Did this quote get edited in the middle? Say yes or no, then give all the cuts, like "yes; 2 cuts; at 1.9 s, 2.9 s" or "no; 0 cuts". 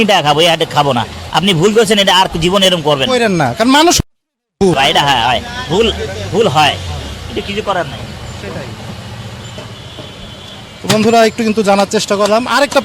no; 0 cuts